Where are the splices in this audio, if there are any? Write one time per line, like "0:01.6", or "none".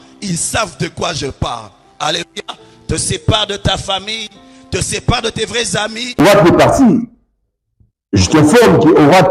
0:06.2